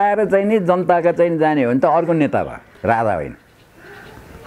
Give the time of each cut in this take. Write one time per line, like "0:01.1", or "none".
none